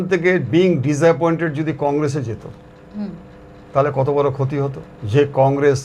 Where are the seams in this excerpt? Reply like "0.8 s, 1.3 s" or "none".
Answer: none